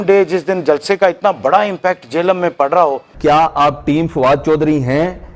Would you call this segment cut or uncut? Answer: cut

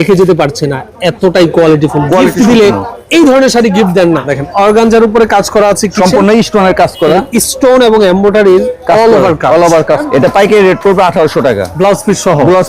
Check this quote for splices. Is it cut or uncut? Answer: cut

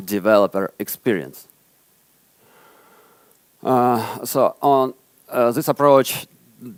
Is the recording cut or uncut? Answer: uncut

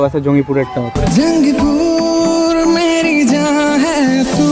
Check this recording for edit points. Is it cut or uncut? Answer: uncut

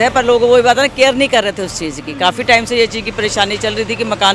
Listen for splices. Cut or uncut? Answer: uncut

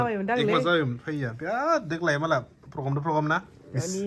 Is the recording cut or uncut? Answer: uncut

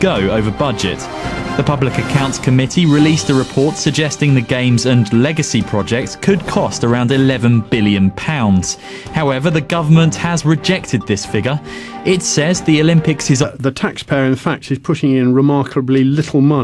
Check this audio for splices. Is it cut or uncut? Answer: uncut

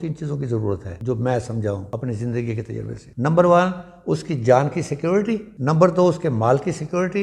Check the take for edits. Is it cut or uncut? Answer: cut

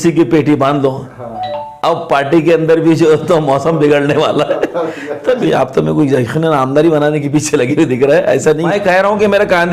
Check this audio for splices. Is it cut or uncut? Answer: cut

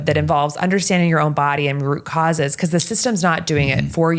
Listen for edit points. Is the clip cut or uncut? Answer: uncut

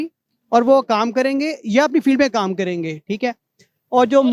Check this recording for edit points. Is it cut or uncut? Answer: uncut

